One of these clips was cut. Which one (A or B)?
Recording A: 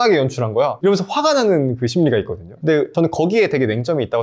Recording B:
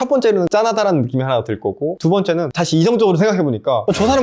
A